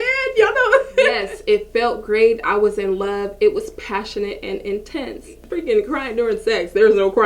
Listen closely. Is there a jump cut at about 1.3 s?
yes; 2 cuts; at 1.3 s, 5.4 s

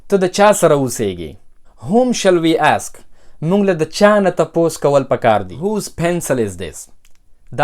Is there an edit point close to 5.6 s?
yes; 1 cut; at 5.6 s

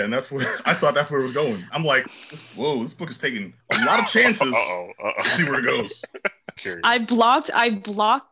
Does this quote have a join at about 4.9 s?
no; 3 cuts; at 2.0 s, 3.5 s, 6.5 s

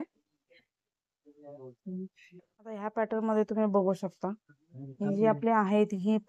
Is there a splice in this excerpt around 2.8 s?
yes; 1 cut; at 2.8 s

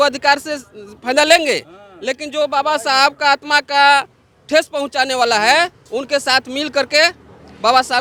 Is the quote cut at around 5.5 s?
no; 0 cuts

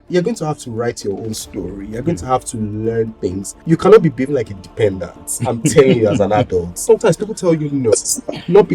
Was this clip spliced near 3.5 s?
yes; 2 cuts; at 3.5 s, 6.7 s

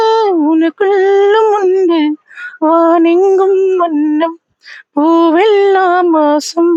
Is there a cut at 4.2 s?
no; 0 cuts

